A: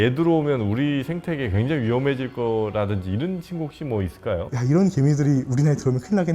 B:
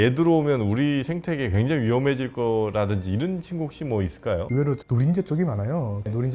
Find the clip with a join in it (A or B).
A